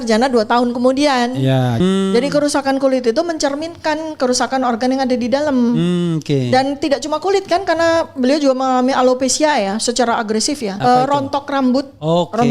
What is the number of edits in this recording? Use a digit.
2